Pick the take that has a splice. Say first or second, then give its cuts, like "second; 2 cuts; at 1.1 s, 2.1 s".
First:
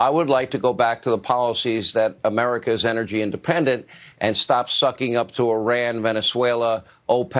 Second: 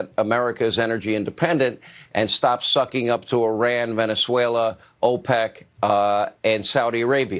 first; 1 cut; at 1.0 s